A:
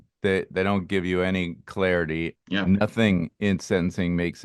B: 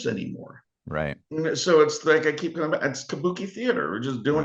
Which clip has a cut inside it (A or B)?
A